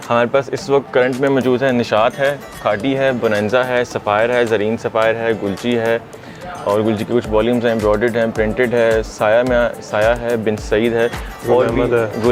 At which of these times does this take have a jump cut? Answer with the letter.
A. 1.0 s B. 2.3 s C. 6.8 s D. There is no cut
D